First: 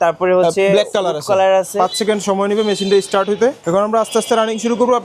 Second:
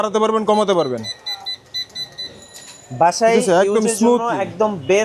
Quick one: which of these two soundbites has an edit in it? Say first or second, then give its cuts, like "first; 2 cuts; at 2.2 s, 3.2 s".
first; 2 cuts; at 1.7 s, 3.6 s